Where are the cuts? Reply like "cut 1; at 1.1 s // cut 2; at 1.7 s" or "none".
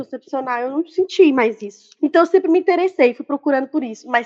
cut 1; at 1.8 s